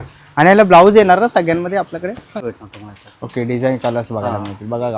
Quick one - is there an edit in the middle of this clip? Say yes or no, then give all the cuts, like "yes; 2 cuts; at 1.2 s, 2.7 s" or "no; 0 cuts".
yes; 1 cut; at 2.5 s